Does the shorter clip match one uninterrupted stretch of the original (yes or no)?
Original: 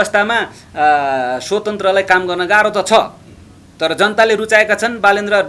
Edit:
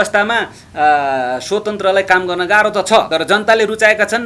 no